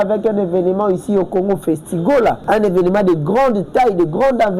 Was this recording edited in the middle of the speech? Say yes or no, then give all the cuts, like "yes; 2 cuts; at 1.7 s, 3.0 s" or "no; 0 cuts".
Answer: yes; 1 cut; at 2.4 s